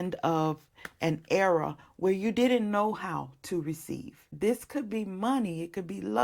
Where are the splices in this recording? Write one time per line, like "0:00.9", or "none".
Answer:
0:04.3